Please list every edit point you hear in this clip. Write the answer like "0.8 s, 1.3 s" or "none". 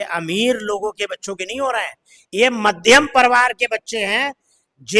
none

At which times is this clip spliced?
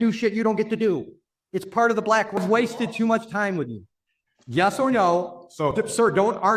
2.4 s

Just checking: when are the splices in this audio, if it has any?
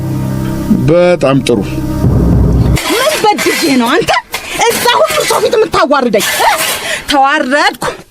2.8 s

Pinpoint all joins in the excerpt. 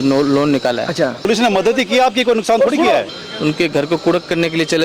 1.3 s, 3.1 s

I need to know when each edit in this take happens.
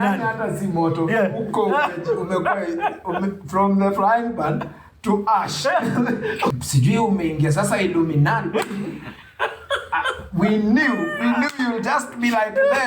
6.5 s

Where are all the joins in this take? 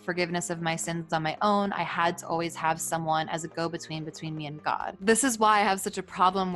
4.9 s

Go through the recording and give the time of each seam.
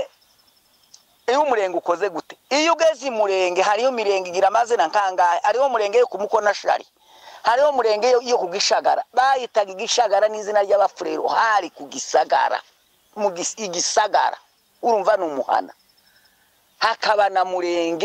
none

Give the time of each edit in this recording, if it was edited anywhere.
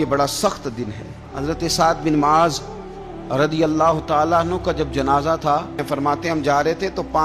1.3 s, 5.8 s

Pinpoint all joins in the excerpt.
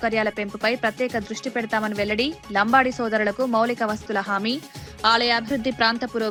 none

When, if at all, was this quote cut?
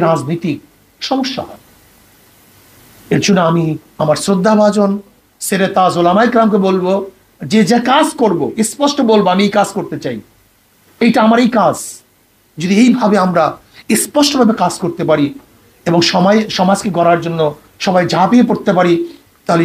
none

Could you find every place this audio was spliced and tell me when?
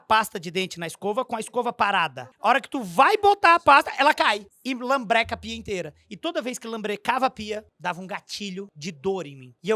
2.3 s, 4.5 s, 7.7 s, 8.9 s

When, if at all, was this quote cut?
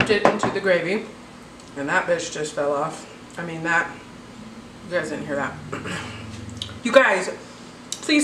6.7 s

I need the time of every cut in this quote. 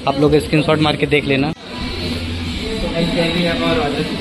1.6 s

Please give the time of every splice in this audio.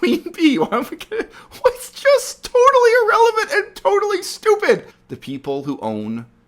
5.0 s

